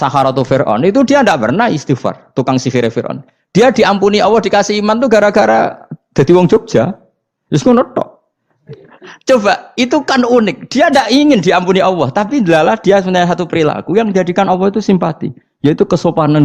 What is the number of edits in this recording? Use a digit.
1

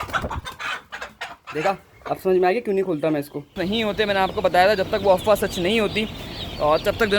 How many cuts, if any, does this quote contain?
1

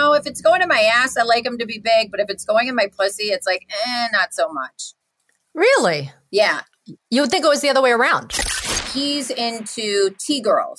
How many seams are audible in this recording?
1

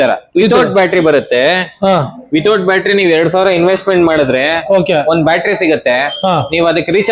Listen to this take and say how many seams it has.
0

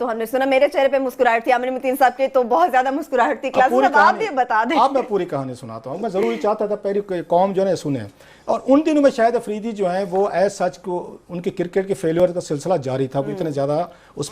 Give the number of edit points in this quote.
1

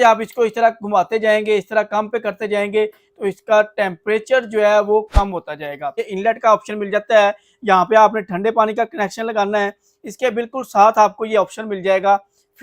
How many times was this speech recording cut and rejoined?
1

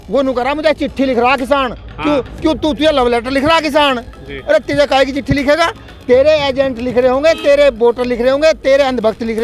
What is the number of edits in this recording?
0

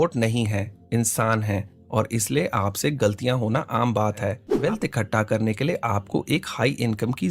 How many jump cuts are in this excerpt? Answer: 1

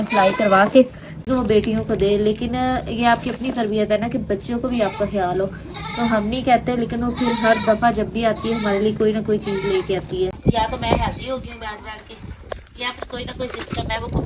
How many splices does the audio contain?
2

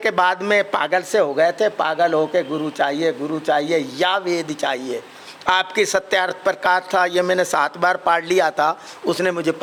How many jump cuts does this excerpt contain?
0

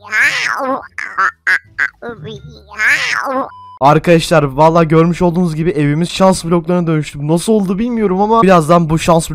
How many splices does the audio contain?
2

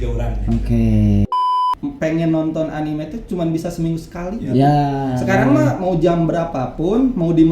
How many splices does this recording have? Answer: 1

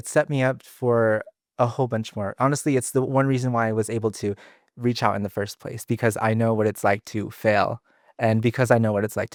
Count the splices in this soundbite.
0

